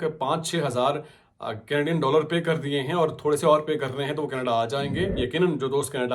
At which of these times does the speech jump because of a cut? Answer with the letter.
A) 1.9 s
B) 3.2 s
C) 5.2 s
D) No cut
C